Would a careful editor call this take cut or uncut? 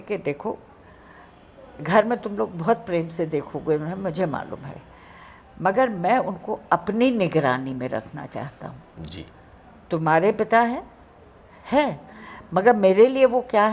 uncut